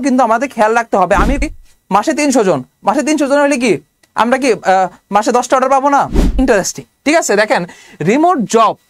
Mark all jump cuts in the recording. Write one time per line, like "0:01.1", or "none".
0:01.4
0:06.3